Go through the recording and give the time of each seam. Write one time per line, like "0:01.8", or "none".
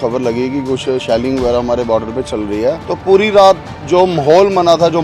0:02.9